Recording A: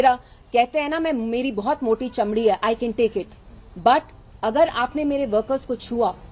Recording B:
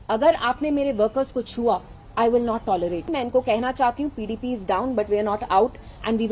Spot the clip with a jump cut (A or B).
B